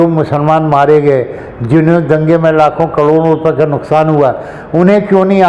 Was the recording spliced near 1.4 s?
no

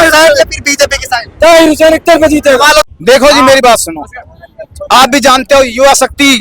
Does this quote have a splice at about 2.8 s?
yes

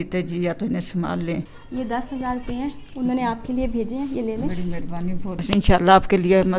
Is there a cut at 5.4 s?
yes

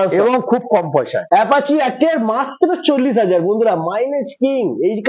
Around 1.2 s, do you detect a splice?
yes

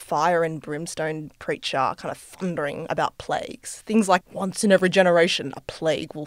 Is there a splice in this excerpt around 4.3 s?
yes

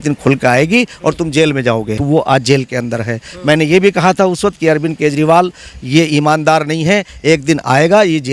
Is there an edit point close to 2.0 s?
yes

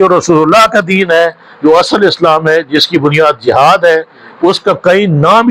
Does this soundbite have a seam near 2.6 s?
no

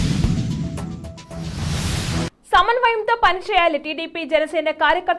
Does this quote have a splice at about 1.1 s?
no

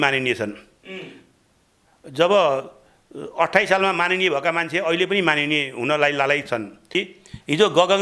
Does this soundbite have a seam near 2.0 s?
no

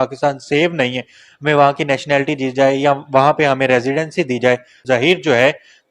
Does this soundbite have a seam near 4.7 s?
yes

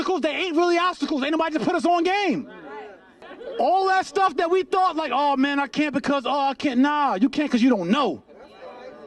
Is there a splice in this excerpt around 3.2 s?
yes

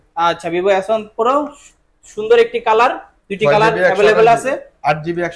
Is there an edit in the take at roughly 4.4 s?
no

